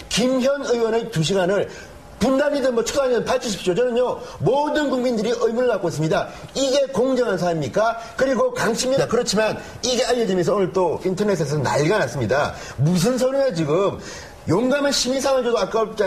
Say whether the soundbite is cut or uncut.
uncut